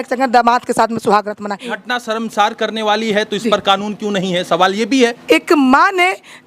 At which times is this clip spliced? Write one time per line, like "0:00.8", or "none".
0:01.7
0:05.2